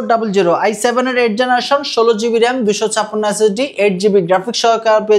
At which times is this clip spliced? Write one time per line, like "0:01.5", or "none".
none